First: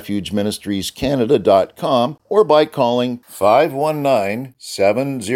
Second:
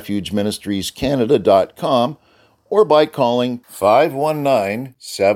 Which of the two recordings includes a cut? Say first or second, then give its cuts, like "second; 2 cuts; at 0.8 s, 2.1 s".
first; 1 cut; at 2.2 s